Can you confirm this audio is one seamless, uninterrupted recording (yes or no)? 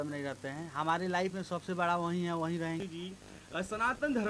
no